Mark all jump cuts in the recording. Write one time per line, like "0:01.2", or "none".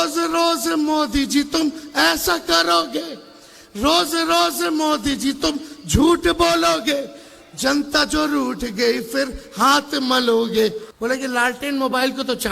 0:10.9